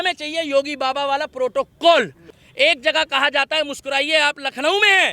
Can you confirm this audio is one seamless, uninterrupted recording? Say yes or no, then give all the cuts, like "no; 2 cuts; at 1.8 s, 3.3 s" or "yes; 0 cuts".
no; 1 cut; at 2.2 s